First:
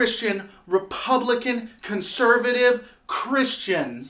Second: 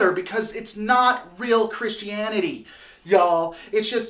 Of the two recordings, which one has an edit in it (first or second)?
second